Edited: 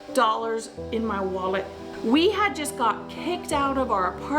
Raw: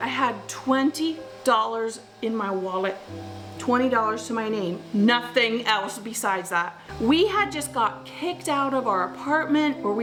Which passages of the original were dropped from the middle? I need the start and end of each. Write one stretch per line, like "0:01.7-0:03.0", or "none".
0:03.2-0:06.8